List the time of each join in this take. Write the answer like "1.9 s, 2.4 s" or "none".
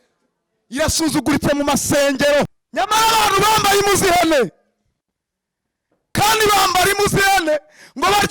2.6 s